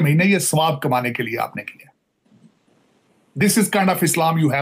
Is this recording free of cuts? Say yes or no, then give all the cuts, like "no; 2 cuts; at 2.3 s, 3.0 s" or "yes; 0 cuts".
yes; 0 cuts